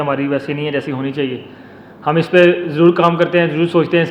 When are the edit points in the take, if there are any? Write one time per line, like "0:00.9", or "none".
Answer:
none

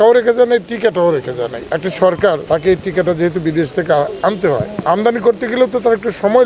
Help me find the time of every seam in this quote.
0:01.6
0:02.4
0:04.7

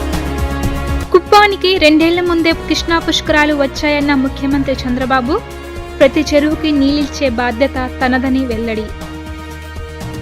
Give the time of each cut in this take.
0:00.9

